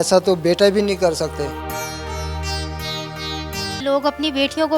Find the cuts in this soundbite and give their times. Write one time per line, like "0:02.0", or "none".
0:03.8